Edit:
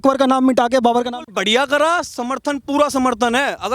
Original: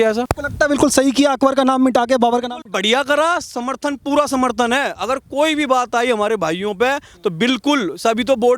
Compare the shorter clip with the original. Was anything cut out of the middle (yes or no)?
no